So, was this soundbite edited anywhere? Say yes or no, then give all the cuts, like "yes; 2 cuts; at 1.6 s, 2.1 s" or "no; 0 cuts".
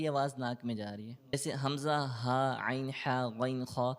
yes; 1 cut; at 1.3 s